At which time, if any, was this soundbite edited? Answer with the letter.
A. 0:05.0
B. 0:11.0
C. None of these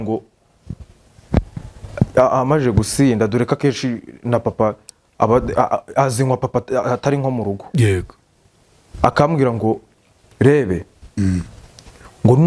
C